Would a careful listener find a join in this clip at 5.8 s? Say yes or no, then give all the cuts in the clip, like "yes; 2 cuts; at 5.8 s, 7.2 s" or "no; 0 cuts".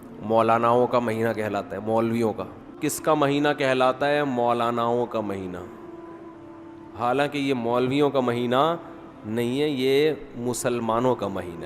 no; 1 cut; at 2.7 s